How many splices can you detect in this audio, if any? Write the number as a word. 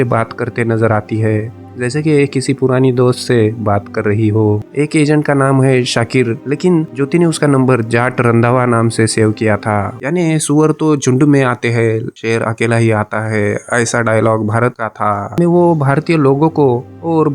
three